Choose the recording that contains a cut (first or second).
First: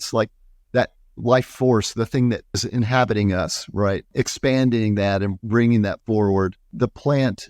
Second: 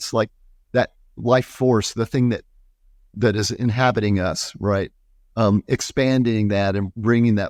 first